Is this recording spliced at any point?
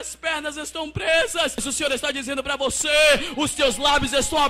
yes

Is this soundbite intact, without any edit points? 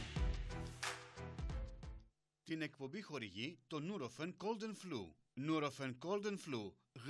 no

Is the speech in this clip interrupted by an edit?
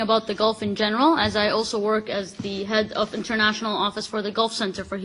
yes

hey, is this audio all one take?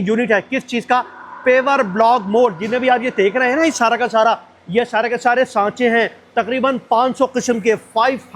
yes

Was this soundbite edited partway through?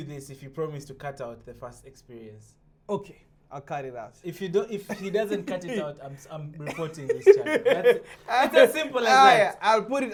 no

